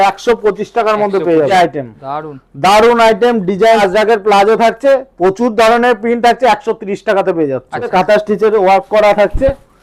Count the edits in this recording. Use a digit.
3